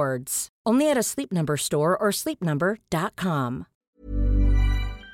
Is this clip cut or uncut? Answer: cut